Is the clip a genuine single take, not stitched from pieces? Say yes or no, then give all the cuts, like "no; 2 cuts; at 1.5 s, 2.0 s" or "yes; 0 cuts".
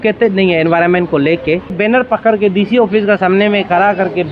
no; 1 cut; at 1.7 s